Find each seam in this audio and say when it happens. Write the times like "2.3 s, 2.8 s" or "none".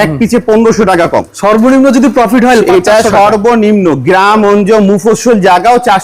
1.3 s